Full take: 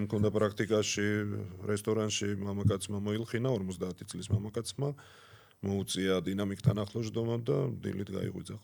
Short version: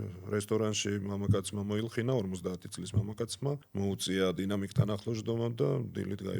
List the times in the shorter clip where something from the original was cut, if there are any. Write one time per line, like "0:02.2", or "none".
0:03.7